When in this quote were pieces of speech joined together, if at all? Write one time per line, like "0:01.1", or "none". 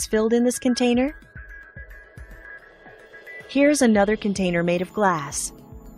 0:03.4

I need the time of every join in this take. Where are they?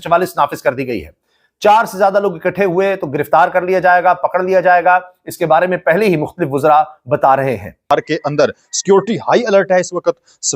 0:07.8

